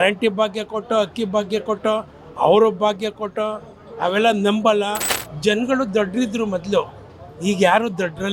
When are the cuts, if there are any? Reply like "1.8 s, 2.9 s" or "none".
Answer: 5.1 s